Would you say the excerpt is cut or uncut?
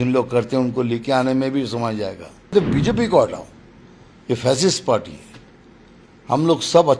cut